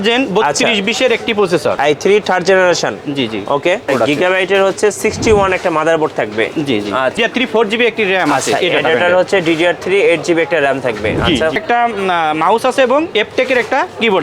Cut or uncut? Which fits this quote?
cut